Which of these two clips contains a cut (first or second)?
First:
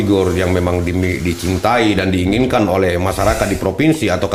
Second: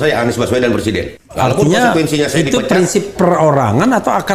second